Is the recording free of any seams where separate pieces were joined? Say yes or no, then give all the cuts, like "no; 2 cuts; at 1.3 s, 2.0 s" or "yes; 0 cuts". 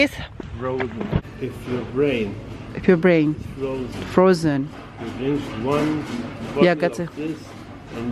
no; 1 cut; at 1.2 s